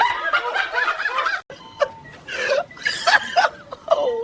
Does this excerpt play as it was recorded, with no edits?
no; 1 cut; at 1.4 s

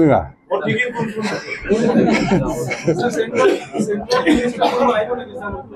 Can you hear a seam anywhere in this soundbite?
no; 0 cuts

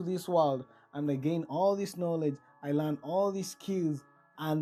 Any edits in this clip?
no; 0 cuts

